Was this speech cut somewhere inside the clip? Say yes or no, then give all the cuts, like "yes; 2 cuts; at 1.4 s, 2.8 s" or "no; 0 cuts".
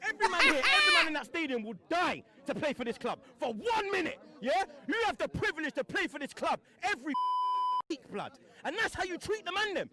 no; 0 cuts